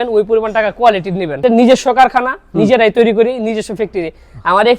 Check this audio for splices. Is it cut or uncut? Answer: cut